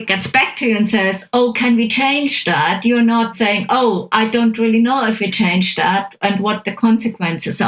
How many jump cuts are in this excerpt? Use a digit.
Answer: 1